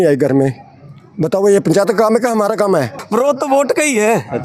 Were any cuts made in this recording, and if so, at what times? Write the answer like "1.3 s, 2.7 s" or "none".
3.0 s